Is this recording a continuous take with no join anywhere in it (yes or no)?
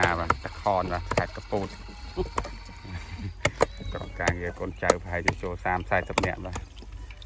yes